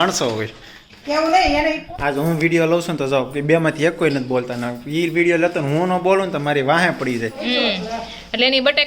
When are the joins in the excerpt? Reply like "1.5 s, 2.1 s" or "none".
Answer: 1.8 s, 7.4 s